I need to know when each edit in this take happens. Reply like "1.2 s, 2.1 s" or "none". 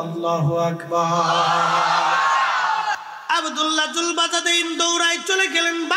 3.0 s